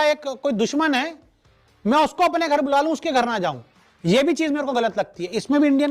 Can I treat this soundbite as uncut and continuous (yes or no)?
yes